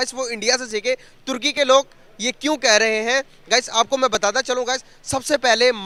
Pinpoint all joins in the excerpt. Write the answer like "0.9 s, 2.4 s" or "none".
none